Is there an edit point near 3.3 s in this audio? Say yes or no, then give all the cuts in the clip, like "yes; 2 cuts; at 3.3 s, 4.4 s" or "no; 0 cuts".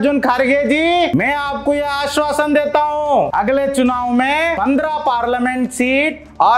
yes; 3 cuts; at 1.1 s, 3.3 s, 4.6 s